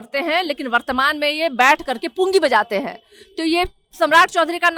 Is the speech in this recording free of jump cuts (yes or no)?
yes